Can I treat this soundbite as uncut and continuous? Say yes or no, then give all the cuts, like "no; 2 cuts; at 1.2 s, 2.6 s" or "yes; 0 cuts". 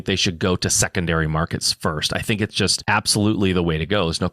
no; 1 cut; at 2.8 s